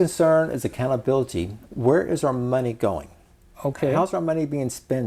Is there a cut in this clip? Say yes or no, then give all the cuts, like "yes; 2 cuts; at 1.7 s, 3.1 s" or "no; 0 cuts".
yes; 1 cut; at 1.6 s